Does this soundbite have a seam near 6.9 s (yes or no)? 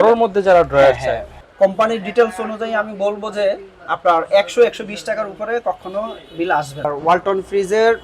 yes